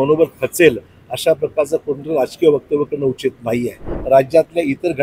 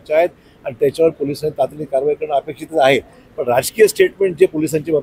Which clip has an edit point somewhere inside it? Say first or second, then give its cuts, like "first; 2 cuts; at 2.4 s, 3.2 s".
first; 1 cut; at 3.9 s